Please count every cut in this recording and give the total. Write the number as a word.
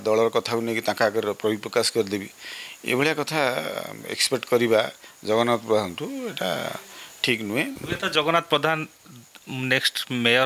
one